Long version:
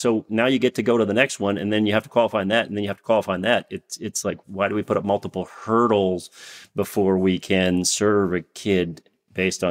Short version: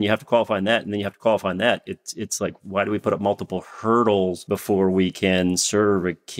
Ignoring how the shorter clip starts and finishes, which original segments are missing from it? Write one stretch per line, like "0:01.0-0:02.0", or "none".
0:06.2-0:06.7